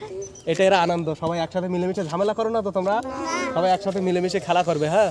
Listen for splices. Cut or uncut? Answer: uncut